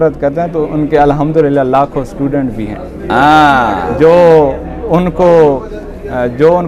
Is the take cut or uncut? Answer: uncut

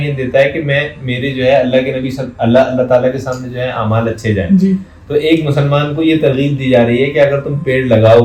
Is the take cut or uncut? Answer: uncut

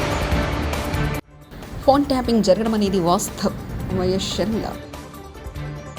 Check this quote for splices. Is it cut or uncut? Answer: uncut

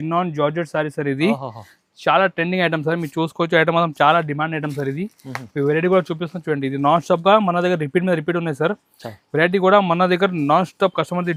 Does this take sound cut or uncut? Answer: uncut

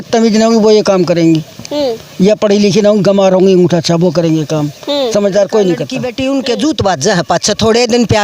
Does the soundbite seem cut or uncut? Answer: cut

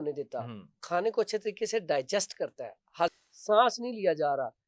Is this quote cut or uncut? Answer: cut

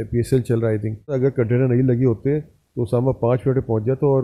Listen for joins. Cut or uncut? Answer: cut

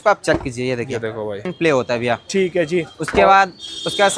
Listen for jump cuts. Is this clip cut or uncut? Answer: cut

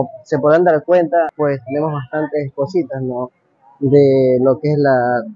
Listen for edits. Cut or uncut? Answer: uncut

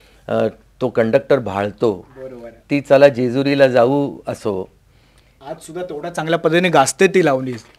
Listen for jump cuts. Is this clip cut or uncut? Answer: uncut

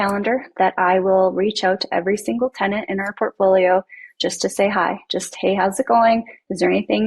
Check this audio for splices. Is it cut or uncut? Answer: uncut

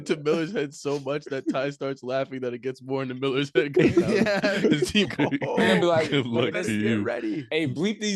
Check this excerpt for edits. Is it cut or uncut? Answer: cut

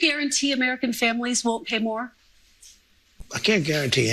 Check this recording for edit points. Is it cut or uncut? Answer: uncut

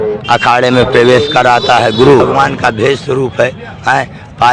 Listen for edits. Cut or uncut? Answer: cut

